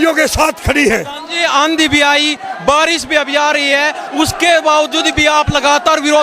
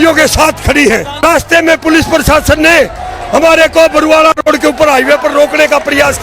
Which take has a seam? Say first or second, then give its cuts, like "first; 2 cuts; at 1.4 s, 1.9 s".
second; 1 cut; at 1.2 s